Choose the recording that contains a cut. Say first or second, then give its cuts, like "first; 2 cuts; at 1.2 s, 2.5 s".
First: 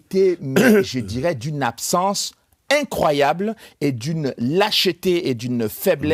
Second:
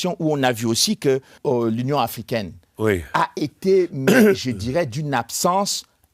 second; 1 cut; at 1.4 s